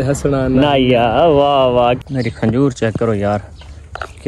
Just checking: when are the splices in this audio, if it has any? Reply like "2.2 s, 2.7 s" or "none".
2.0 s